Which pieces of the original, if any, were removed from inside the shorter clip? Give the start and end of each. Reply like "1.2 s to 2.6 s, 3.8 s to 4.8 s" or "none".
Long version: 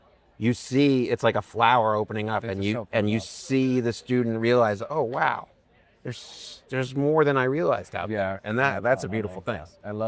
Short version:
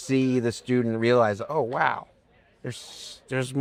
none